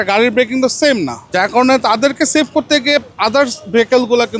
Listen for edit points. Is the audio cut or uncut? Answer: cut